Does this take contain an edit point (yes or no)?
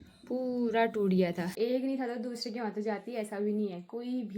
yes